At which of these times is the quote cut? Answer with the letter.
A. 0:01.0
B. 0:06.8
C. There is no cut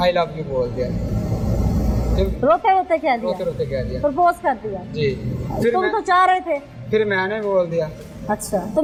C